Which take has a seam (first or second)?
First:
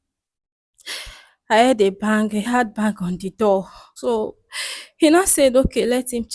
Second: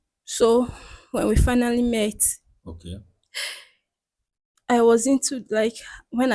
first